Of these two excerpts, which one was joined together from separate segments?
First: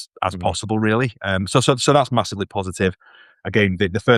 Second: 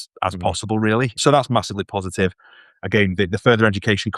second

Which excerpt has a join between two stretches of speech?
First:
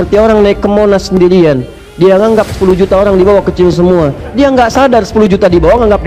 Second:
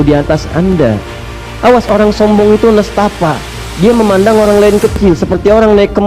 second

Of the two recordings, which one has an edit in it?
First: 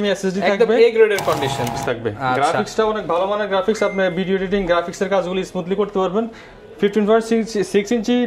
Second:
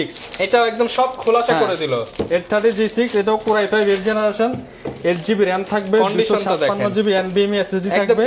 first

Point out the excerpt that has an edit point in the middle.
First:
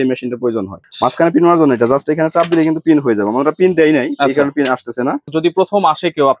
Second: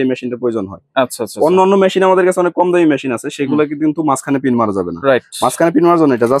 first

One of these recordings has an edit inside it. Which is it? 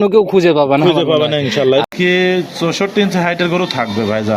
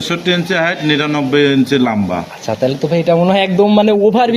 first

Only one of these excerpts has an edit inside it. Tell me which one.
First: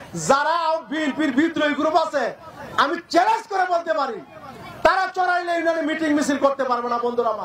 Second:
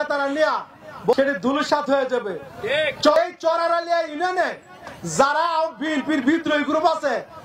second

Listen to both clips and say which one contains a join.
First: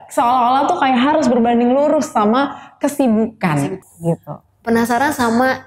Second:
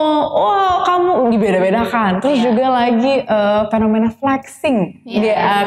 first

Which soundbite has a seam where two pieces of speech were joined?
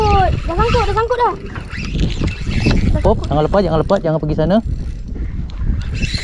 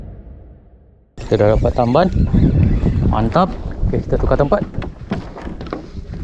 second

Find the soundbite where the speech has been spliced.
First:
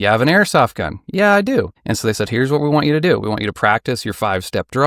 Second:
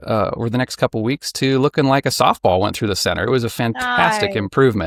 first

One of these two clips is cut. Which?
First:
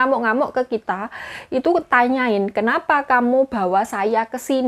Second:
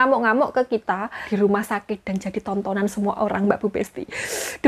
second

